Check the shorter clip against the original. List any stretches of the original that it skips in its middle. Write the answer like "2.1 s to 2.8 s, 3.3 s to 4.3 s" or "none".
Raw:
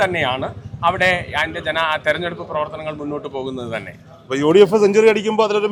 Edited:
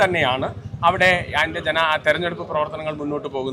none